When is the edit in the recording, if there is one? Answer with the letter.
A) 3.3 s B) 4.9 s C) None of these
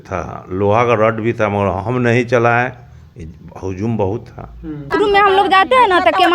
B